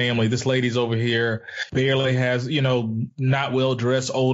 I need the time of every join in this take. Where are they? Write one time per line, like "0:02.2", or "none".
0:01.6